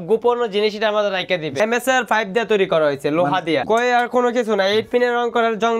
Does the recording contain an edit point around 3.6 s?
yes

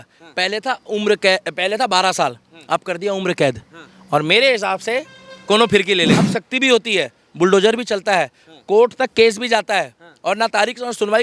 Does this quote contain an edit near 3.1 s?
no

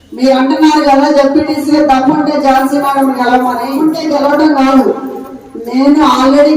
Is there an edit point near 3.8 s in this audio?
yes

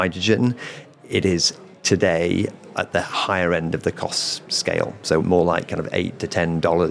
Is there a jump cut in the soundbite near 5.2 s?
yes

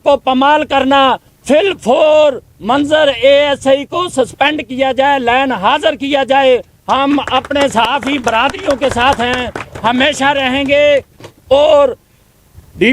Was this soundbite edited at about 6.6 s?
no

